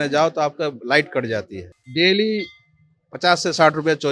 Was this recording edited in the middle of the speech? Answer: yes; 1 cut; at 1.7 s

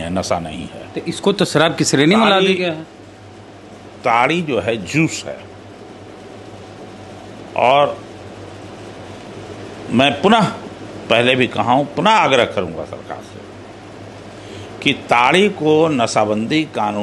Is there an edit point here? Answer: no; 0 cuts

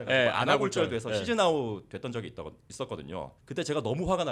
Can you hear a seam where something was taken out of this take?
yes; 1 cut; at 3.4 s

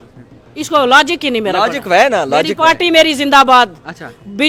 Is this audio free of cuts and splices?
yes; 0 cuts

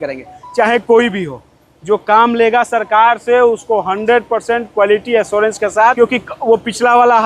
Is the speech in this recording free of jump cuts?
no; 1 cut; at 5.9 s

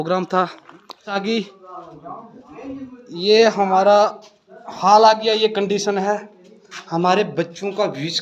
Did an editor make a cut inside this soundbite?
yes; 1 cut; at 1.1 s

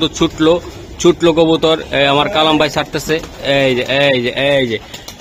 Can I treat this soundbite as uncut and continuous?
yes; 0 cuts

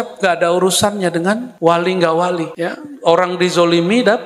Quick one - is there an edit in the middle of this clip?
no; 0 cuts

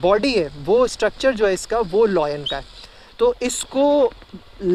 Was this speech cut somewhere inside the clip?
no; 0 cuts

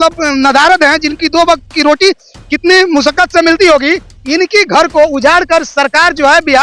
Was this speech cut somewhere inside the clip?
no; 0 cuts

